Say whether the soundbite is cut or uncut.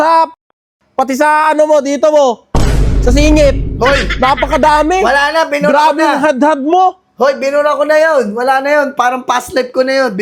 uncut